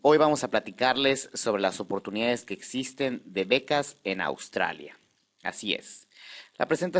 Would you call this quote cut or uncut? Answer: uncut